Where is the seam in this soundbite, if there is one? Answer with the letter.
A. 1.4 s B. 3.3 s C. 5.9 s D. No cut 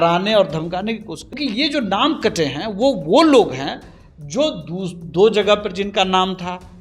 A